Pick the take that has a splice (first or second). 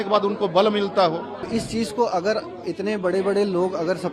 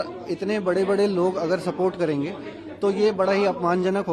first